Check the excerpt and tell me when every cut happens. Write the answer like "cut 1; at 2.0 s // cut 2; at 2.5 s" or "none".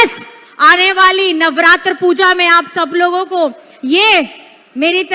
none